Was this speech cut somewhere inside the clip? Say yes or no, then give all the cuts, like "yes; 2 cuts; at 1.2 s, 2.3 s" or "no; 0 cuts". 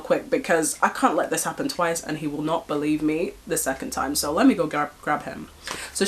no; 0 cuts